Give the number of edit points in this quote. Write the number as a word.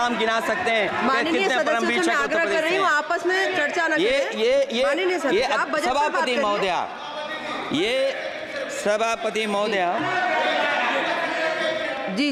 zero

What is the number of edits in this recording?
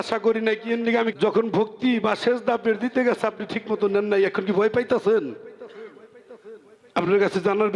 one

